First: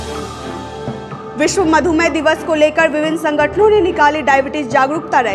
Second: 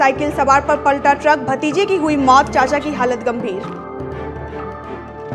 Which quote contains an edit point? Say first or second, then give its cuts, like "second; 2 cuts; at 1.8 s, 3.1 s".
first; 1 cut; at 1.1 s